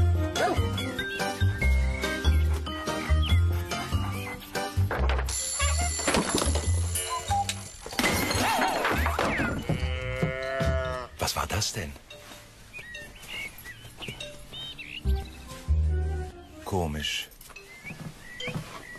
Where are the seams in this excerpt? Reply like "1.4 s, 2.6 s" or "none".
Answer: none